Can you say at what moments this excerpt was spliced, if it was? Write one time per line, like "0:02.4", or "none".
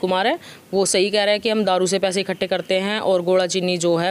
none